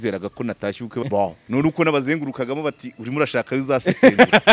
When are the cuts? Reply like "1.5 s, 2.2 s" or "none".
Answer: 1.1 s